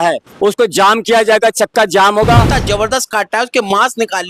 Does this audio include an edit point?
yes; 1 cut; at 2.5 s

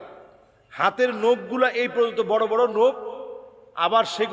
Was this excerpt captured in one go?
yes; 0 cuts

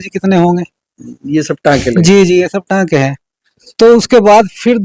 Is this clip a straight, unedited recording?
yes; 0 cuts

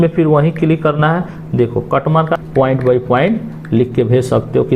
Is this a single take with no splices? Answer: no; 1 cut; at 2.4 s

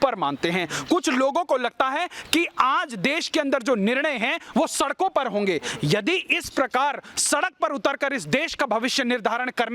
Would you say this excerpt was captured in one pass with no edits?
yes; 0 cuts

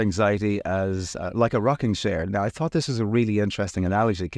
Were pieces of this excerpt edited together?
no; 0 cuts

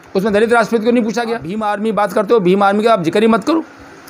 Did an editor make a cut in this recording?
yes; 1 cut; at 1.7 s

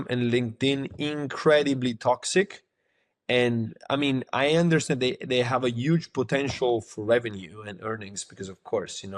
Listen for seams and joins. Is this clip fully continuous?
yes; 0 cuts

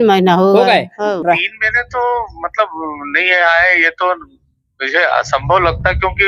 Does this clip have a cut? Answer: yes; 1 cut; at 1.2 s

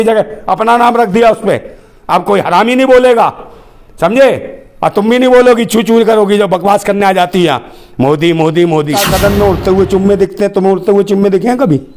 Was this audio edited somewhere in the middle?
yes; 1 cut; at 9.1 s

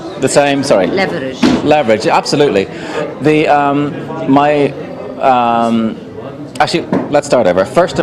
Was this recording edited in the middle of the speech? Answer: no; 0 cuts

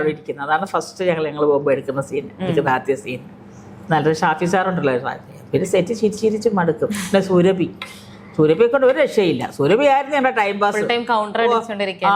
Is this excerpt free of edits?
yes; 0 cuts

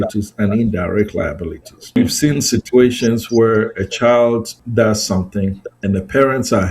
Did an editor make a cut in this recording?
yes; 3 cuts; at 2.0 s, 4.6 s, 5.7 s

